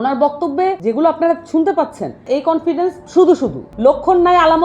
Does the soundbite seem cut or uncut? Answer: cut